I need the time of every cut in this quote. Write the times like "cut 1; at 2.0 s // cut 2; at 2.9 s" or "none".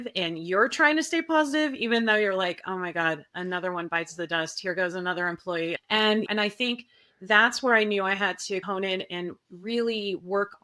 cut 1; at 5.8 s